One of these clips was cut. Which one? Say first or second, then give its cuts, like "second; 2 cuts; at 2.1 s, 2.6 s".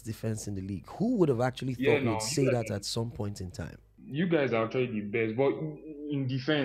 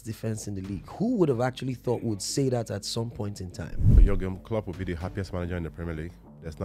second; 1 cut; at 4.0 s